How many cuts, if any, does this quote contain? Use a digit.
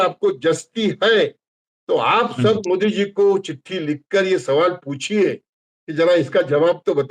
0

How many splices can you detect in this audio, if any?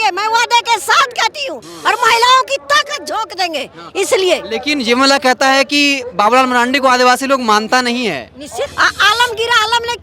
1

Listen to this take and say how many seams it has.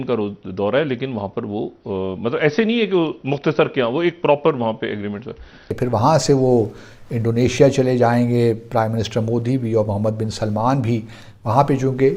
1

